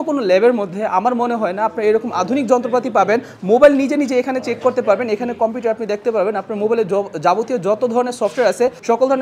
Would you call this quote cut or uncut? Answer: uncut